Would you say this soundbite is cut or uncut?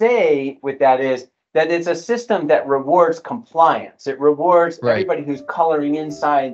uncut